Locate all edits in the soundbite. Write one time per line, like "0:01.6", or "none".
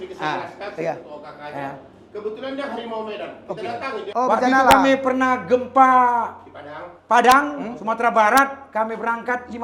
0:04.0